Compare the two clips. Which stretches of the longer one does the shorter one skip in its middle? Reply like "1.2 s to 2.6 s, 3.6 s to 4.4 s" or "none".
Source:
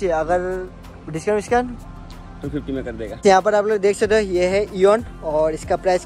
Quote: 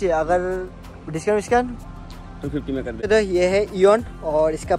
3.0 s to 4.0 s